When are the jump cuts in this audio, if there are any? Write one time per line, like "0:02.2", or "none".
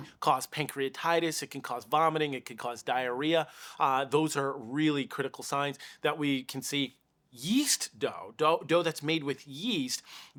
none